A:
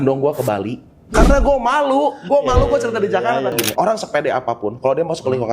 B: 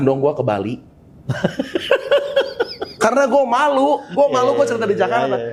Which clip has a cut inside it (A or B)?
A